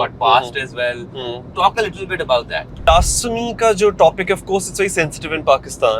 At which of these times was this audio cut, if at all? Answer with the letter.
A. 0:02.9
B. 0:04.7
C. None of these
A